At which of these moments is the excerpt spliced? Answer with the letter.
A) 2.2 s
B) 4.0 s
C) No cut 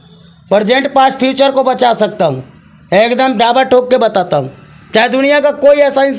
C